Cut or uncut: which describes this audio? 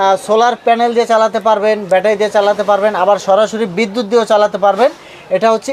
uncut